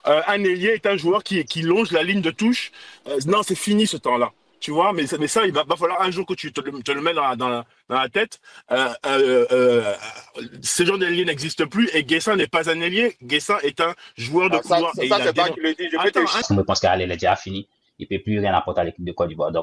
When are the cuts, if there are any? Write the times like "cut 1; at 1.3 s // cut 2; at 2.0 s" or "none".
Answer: cut 1; at 16.4 s